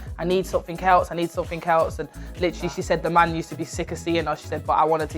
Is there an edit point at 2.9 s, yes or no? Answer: no